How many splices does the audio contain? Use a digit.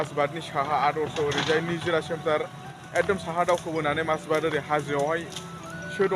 1